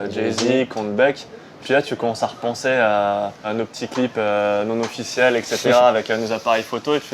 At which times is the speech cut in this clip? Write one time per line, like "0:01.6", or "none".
0:01.6
0:03.5